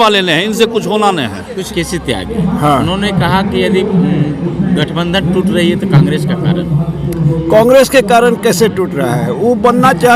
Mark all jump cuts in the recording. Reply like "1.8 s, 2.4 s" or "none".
1.7 s